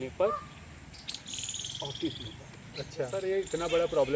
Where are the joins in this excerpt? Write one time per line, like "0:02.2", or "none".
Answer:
0:03.1